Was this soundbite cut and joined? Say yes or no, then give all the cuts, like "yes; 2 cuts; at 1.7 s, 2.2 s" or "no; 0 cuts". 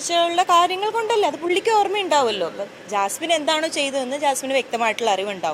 no; 0 cuts